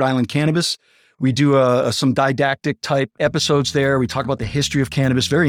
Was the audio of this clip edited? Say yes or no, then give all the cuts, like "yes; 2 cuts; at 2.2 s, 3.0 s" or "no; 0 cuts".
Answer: no; 0 cuts